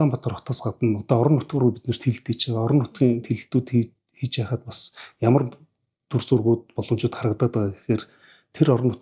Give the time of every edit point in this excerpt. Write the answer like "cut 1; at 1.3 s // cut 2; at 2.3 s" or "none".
none